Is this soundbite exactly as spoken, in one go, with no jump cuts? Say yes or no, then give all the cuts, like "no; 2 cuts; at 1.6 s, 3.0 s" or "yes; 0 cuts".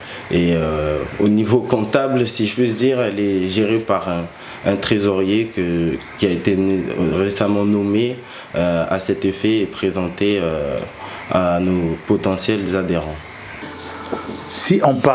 no; 1 cut; at 13.6 s